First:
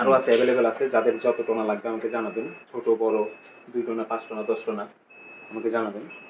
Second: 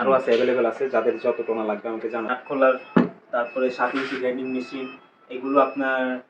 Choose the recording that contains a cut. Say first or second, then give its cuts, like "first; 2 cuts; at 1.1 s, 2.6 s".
second; 1 cut; at 2.3 s